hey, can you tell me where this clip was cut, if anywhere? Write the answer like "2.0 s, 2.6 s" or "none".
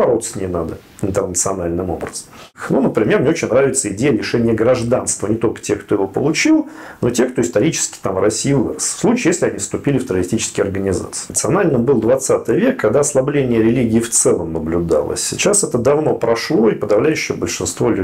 2.5 s, 11.3 s